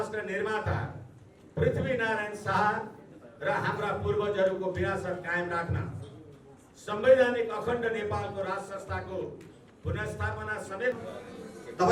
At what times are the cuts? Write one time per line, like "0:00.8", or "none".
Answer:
0:11.0